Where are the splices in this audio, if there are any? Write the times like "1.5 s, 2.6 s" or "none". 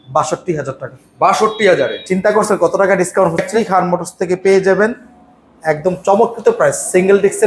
3.5 s